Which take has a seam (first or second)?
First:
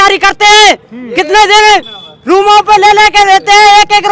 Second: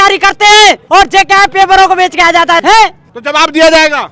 second